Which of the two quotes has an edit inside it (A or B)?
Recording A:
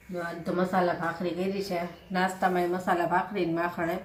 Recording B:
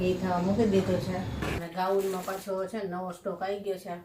B